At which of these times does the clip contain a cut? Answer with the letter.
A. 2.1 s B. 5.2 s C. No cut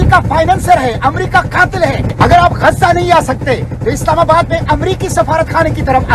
A